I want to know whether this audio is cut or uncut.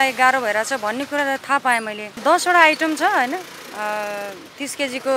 cut